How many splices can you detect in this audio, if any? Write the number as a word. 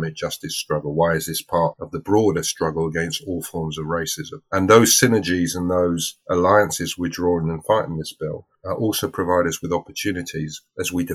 zero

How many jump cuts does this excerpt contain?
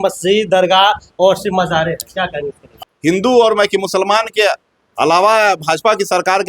one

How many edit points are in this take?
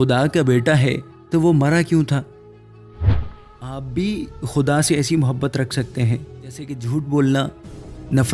two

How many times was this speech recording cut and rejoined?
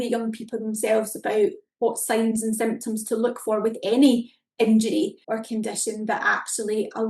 one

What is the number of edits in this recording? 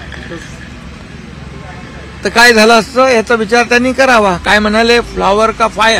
zero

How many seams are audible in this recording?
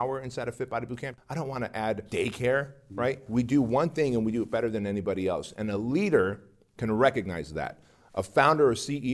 three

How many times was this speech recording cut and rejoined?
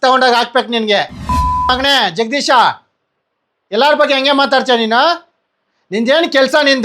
one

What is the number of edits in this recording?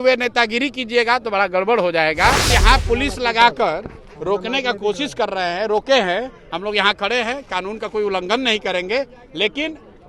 one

